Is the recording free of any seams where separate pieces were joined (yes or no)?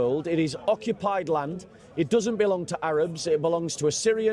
yes